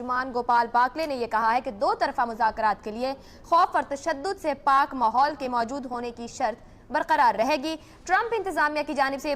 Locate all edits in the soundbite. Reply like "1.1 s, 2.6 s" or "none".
8.2 s